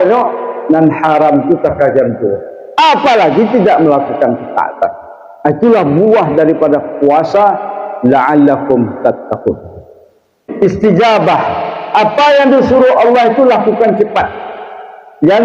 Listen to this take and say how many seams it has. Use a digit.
1